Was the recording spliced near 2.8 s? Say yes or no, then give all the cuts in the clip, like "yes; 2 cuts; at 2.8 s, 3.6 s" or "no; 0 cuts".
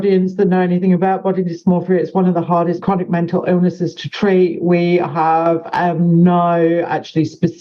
yes; 1 cut; at 2.8 s